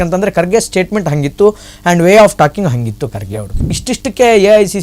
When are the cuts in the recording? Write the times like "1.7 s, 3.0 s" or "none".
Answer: 3.8 s